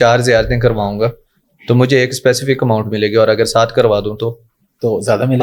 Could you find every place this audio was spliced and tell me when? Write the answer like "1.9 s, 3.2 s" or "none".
none